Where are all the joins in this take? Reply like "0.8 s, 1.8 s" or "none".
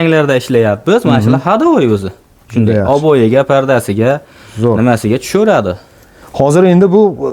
6.2 s